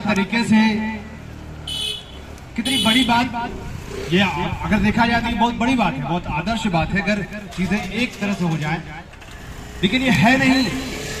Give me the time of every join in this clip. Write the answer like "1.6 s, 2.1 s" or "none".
none